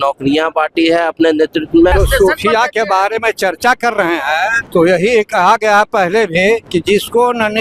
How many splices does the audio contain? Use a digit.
3